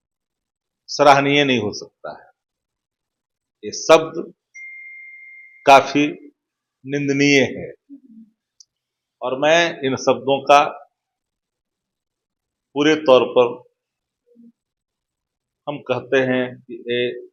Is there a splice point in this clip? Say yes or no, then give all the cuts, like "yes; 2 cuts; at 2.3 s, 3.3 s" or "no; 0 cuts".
no; 0 cuts